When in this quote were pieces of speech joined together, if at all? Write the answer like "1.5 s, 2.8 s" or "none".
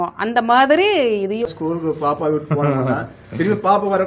1.5 s